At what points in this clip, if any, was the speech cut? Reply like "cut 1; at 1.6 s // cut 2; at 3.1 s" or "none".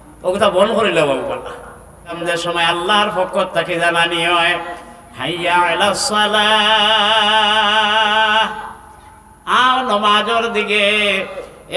cut 1; at 2.2 s

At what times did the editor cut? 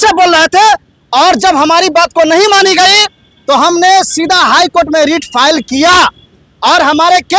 none

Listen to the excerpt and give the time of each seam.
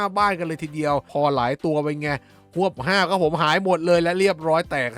cut 1; at 1.1 s

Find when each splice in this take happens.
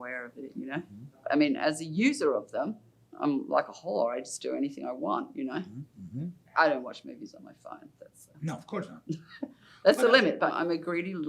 none

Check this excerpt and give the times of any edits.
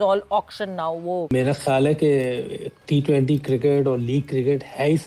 cut 1; at 1.3 s

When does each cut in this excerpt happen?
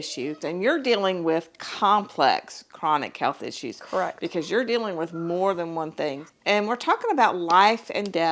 cut 1; at 6.3 s

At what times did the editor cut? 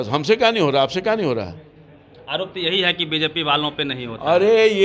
none

